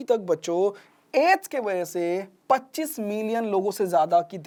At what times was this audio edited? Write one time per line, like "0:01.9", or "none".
none